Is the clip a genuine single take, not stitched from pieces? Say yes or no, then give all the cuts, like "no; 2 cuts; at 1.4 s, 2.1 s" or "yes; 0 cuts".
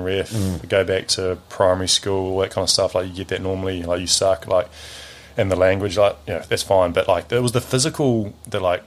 yes; 0 cuts